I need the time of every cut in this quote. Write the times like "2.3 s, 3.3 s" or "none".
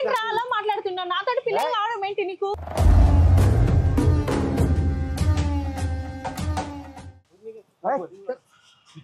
7.1 s